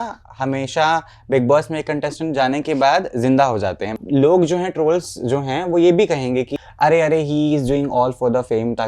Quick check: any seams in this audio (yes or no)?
yes